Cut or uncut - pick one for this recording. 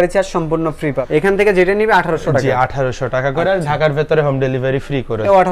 uncut